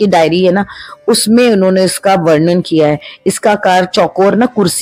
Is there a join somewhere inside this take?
no; 0 cuts

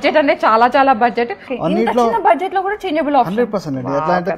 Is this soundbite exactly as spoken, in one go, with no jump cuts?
no; 1 cut; at 1.5 s

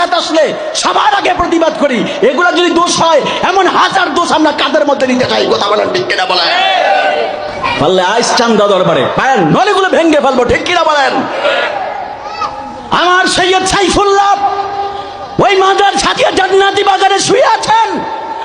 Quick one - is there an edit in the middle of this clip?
yes; 1 cut; at 7.6 s

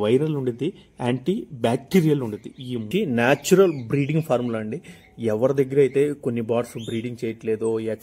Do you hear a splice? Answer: yes; 1 cut; at 2.9 s

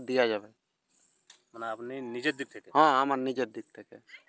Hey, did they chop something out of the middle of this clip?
no; 0 cuts

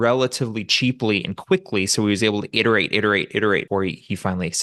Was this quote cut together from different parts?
yes; 1 cut; at 3.7 s

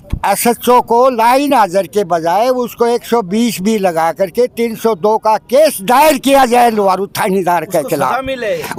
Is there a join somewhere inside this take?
no; 0 cuts

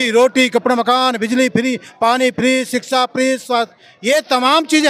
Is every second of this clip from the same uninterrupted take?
yes; 0 cuts

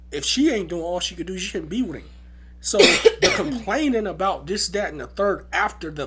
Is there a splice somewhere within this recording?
no; 0 cuts

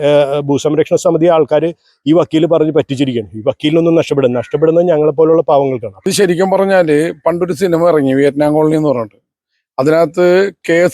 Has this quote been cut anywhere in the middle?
yes; 1 cut; at 5.9 s

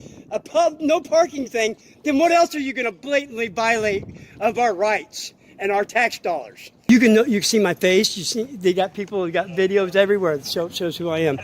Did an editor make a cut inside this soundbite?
yes; 1 cut; at 6.9 s

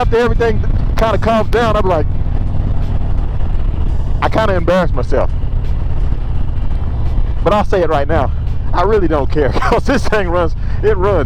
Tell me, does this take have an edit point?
no; 0 cuts

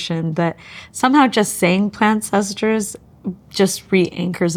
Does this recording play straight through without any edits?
yes; 0 cuts

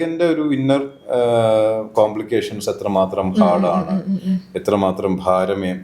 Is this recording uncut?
yes; 0 cuts

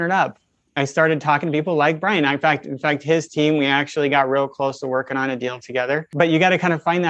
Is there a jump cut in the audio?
yes; 1 cut; at 6.1 s

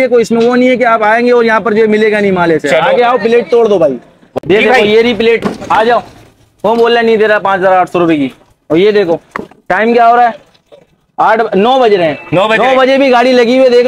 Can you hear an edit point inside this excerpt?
yes; 1 cut; at 4.2 s

